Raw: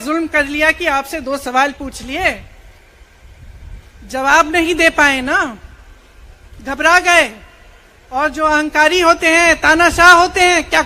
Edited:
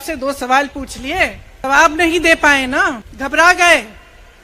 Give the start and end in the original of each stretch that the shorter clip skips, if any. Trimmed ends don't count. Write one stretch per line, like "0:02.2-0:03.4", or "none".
0:02.7-0:04.2
0:05.6-0:06.6

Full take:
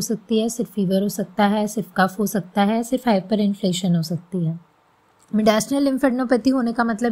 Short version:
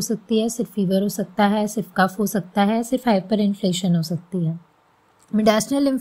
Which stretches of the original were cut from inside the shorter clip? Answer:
none

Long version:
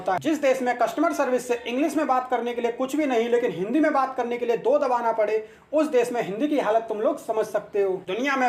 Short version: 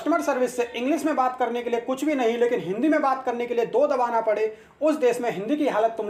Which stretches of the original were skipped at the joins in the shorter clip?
none

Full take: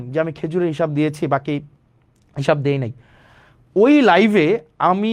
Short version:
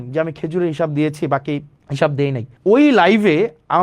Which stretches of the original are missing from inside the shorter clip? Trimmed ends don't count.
0:01.8-0:02.2
0:02.9-0:03.6

